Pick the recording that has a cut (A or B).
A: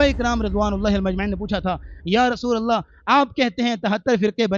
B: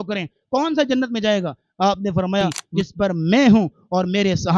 B